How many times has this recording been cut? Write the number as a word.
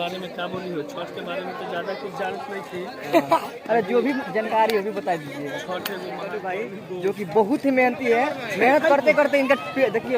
one